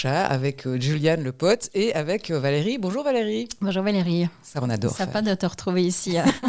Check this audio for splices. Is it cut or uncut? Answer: uncut